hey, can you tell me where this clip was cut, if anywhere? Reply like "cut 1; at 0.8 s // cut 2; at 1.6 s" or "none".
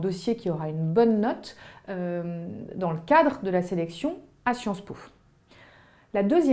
none